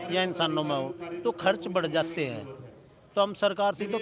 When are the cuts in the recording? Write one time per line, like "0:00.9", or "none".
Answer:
none

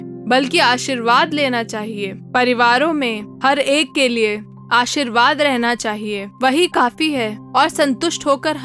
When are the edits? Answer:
0:07.4

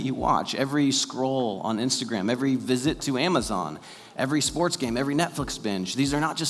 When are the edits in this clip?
none

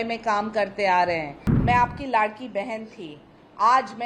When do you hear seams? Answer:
0:01.5

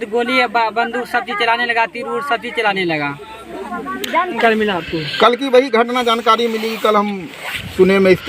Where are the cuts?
0:04.4

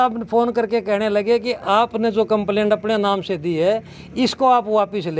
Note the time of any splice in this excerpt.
none

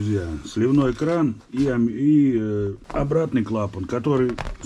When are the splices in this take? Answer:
0:02.8

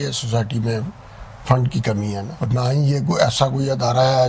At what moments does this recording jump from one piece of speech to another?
0:02.3

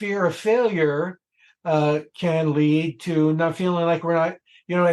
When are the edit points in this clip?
none

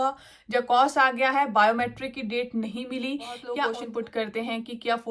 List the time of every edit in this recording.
0:03.5

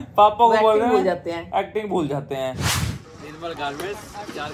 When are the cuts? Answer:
0:02.6

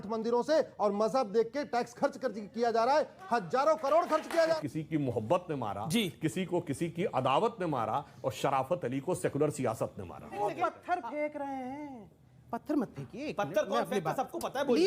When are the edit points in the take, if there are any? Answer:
0:04.6
0:10.4

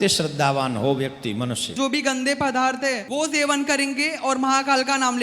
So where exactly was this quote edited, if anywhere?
0:01.7
0:03.0

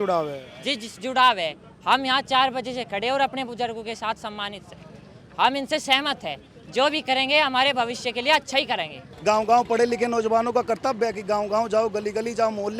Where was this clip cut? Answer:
0:09.1

